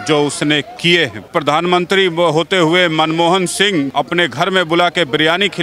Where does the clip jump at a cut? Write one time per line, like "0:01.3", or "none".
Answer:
0:01.3
0:03.9